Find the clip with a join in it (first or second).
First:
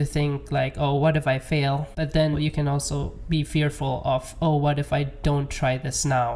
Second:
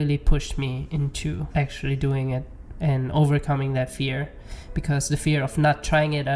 first